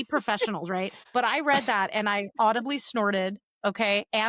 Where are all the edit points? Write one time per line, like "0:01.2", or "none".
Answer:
0:01.0